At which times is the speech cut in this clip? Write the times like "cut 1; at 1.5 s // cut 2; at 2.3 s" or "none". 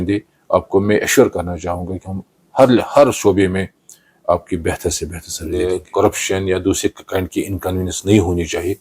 cut 1; at 5.4 s